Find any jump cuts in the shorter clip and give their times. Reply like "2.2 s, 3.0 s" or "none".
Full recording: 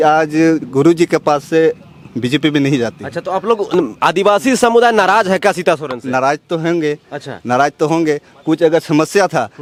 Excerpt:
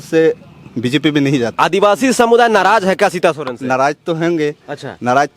1.5 s